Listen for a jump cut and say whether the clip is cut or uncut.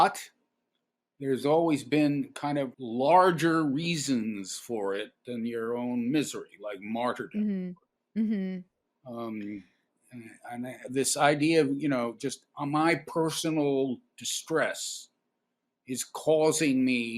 cut